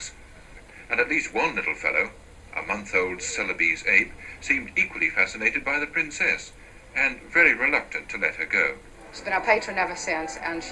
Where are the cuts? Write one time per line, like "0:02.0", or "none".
0:04.8